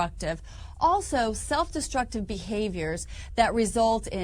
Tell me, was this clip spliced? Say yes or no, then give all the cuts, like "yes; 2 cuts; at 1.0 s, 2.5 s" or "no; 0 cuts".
yes; 1 cut; at 1.1 s